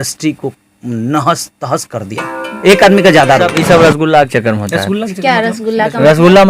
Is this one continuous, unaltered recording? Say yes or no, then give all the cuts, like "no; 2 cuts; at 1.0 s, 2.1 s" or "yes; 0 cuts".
no; 1 cut; at 3.5 s